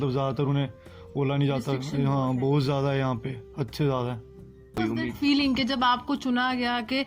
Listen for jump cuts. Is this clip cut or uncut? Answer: cut